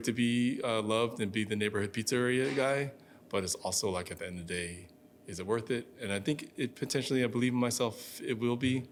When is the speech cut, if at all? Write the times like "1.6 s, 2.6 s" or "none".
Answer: none